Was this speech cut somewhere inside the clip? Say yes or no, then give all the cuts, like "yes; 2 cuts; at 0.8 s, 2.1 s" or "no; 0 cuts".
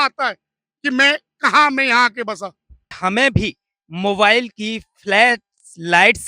yes; 1 cut; at 2.9 s